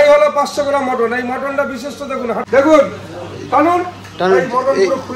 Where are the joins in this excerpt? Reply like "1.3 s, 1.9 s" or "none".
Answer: 2.4 s